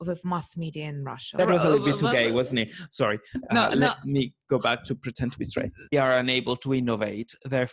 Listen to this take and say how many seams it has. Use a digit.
2